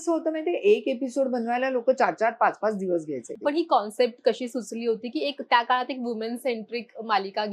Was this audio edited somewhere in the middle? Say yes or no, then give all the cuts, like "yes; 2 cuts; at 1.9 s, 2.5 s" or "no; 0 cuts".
yes; 1 cut; at 3.3 s